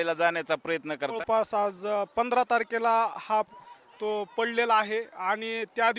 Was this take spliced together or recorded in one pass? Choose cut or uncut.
cut